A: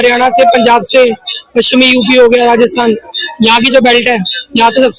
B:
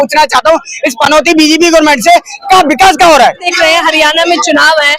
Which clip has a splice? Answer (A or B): B